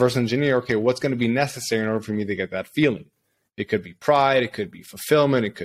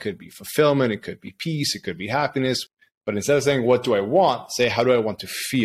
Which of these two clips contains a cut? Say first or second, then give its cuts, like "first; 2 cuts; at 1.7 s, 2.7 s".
second; 1 cut; at 2.6 s